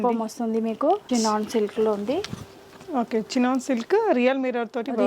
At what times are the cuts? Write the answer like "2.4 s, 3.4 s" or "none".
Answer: 1.0 s